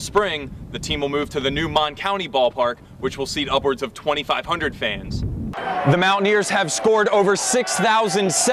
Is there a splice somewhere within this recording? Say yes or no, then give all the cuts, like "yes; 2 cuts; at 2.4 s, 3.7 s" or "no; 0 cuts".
yes; 1 cut; at 5.5 s